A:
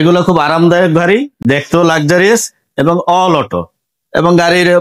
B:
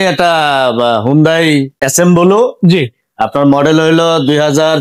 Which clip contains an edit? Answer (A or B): B